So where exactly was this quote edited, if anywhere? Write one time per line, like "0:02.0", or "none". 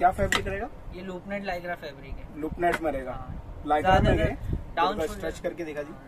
none